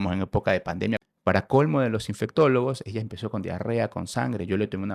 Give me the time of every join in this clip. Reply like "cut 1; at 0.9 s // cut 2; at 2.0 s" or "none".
cut 1; at 1.1 s

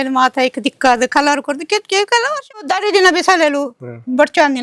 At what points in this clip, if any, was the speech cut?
cut 1; at 2.6 s

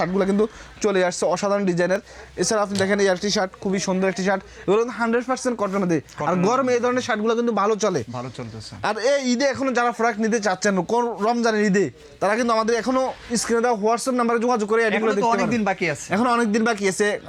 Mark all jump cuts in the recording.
none

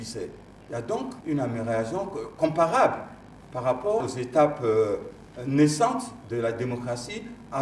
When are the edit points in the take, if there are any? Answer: cut 1; at 1.2 s // cut 2; at 4.0 s

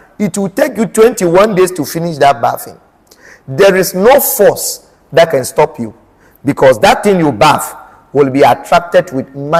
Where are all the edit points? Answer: none

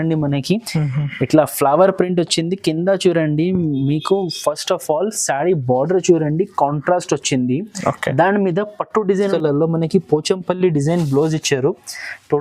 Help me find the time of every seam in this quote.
cut 1; at 9.3 s

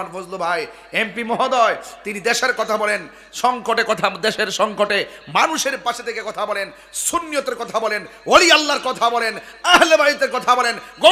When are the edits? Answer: none

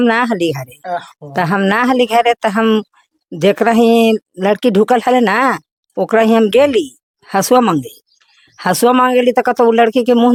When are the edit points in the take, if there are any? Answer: none

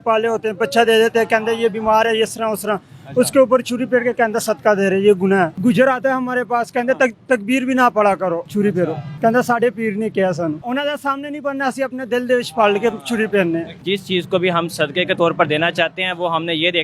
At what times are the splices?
cut 1; at 5.5 s // cut 2; at 8.6 s // cut 3; at 10.6 s // cut 4; at 13.8 s

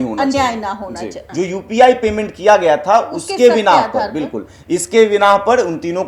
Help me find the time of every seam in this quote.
cut 1; at 1.2 s

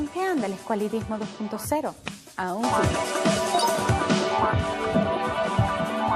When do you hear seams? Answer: cut 1; at 3.2 s

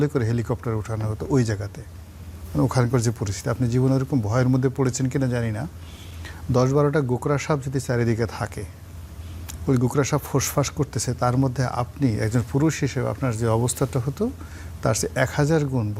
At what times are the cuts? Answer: none

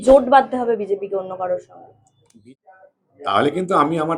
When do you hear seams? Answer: cut 1; at 2.4 s

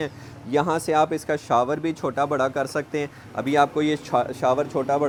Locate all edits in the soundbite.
none

